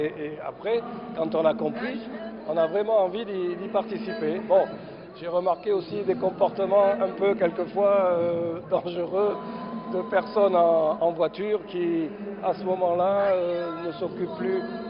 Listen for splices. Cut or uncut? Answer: uncut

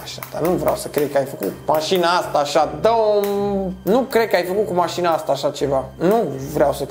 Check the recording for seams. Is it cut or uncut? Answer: uncut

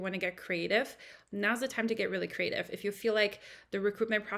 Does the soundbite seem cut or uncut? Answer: uncut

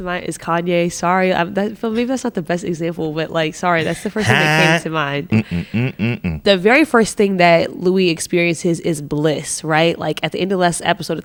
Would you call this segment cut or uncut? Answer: uncut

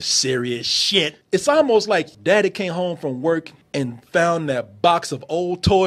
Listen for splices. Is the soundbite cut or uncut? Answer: cut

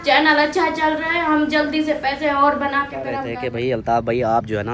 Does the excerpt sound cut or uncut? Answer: cut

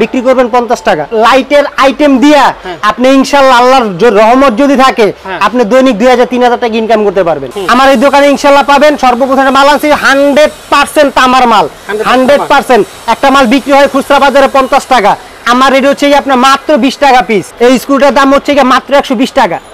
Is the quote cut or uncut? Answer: cut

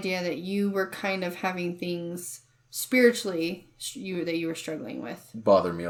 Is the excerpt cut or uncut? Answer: uncut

